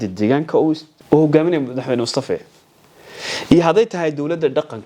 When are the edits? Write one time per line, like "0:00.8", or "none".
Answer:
0:00.9

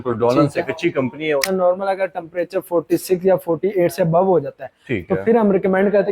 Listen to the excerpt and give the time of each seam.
0:01.5

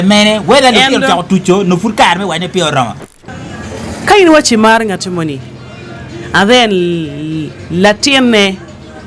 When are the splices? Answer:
0:03.1

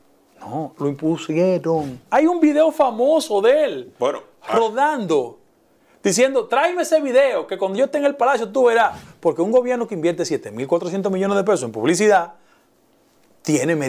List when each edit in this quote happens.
0:02.0
0:09.0

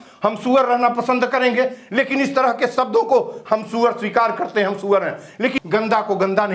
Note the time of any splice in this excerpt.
0:05.5

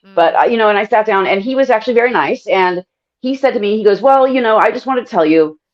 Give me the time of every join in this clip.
none

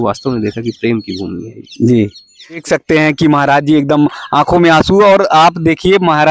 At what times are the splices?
0:02.6

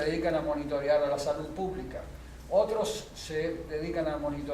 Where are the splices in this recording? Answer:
0:02.7

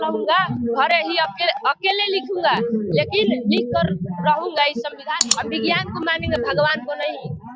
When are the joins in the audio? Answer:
0:05.2

